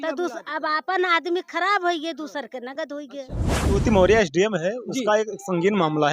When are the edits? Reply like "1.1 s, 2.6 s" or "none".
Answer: 3.7 s